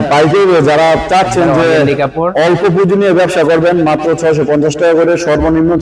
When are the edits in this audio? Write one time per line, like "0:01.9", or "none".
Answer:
none